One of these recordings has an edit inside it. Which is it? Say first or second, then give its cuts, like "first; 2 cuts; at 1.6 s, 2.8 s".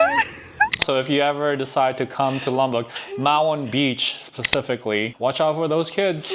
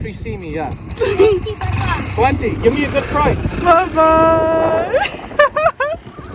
first; 2 cuts; at 0.8 s, 5.1 s